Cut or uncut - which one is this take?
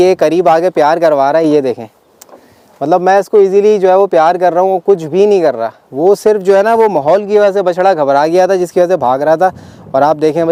uncut